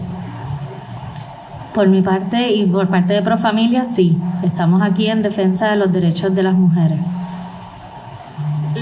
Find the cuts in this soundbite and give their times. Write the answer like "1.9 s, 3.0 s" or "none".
1.0 s